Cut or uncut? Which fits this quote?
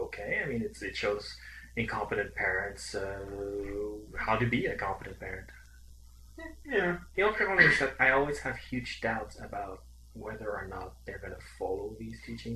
uncut